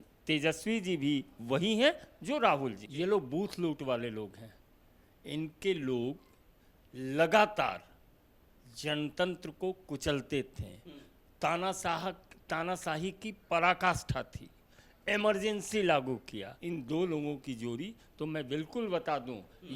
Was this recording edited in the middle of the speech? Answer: yes; 2 cuts; at 2.8 s, 16.5 s

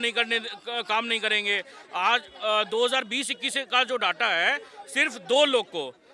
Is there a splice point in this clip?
no; 0 cuts

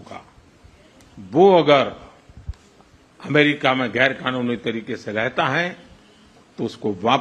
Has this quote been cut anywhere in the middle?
no; 0 cuts

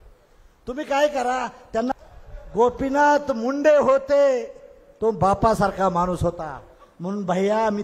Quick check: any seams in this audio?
yes; 1 cut; at 1.9 s

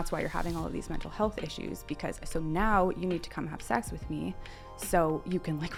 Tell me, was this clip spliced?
no; 0 cuts

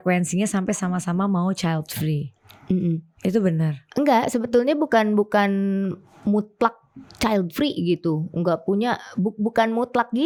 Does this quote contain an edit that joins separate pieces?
no; 0 cuts

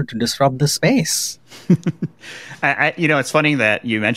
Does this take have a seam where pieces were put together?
no; 0 cuts

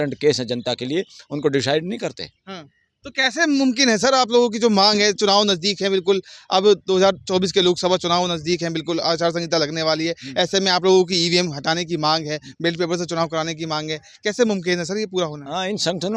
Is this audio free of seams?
yes; 0 cuts

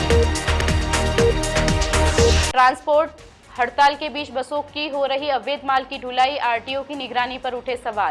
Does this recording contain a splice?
yes; 1 cut; at 2.1 s

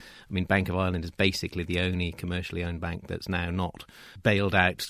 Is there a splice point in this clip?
no; 0 cuts

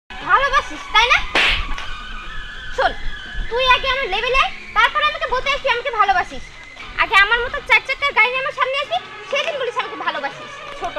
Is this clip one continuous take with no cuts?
yes; 0 cuts

